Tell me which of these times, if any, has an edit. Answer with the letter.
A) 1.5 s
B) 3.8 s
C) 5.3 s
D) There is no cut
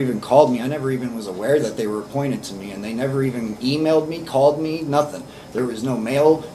D